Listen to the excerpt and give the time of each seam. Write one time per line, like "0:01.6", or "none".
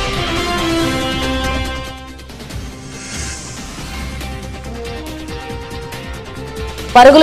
0:01.5
0:02.9
0:04.1